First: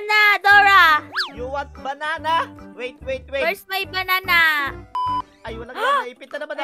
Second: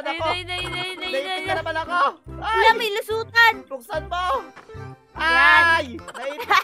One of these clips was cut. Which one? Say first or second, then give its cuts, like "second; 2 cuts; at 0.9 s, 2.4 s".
first; 1 cut; at 5.0 s